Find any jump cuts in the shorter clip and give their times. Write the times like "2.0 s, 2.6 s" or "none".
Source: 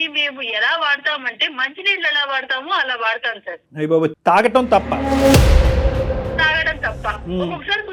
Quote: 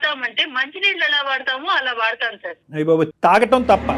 none